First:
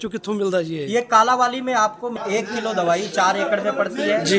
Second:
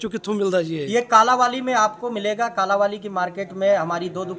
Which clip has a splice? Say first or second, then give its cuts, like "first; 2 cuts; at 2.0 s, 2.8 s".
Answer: first; 1 cut; at 2.2 s